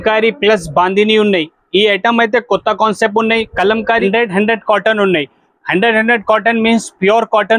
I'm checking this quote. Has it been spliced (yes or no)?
yes